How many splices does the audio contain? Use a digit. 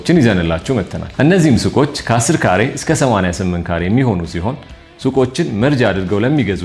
1